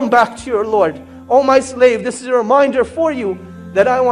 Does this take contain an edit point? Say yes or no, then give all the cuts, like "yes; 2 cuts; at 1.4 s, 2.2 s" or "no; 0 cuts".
no; 0 cuts